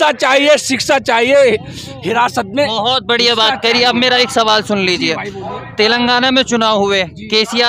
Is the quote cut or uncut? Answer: uncut